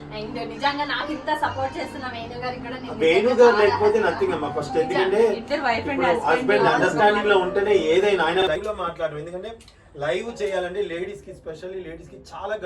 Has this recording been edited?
yes; 1 cut; at 8.6 s

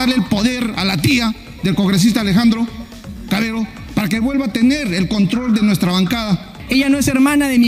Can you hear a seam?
yes; 1 cut; at 6.5 s

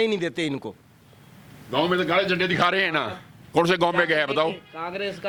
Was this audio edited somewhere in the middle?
no; 0 cuts

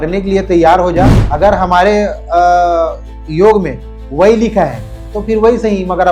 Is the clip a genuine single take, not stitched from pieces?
no; 1 cut; at 1.2 s

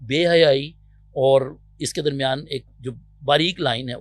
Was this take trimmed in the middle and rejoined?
no; 0 cuts

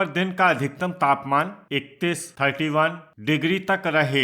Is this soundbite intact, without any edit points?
no; 2 cuts; at 1.6 s, 3.1 s

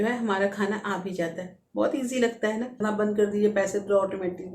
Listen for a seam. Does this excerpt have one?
yes; 1 cut; at 2.8 s

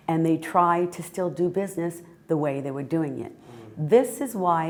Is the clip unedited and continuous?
yes; 0 cuts

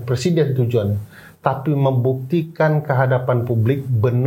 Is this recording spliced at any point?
no; 0 cuts

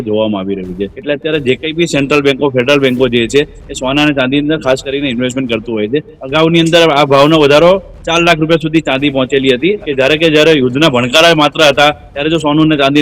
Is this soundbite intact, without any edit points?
no; 3 cuts; at 0.9 s, 6.2 s, 9.8 s

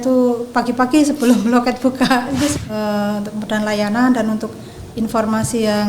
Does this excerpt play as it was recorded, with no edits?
no; 1 cut; at 2.5 s

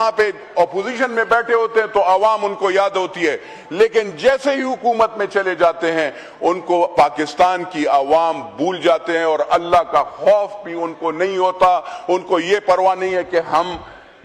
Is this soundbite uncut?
yes; 0 cuts

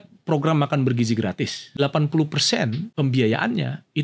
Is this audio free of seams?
no; 2 cuts; at 1.8 s, 2.8 s

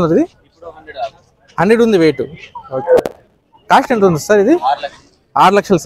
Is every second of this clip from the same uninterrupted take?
yes; 0 cuts

